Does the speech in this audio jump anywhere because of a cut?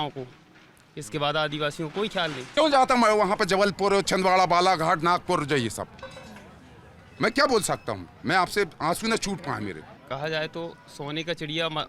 yes; 2 cuts; at 2.4 s, 9.9 s

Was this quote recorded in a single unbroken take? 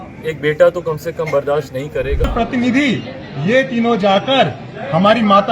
no; 1 cut; at 2.3 s

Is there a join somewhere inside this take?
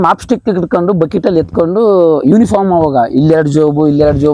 no; 0 cuts

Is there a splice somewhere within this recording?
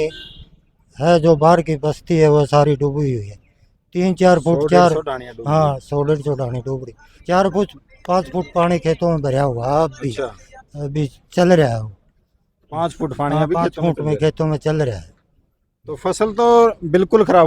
no; 0 cuts

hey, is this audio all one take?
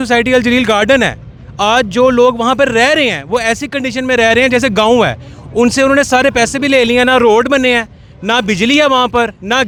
yes; 0 cuts

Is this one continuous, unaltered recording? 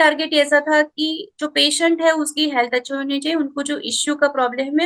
yes; 0 cuts

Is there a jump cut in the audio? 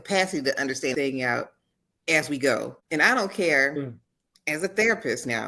yes; 1 cut; at 2.8 s

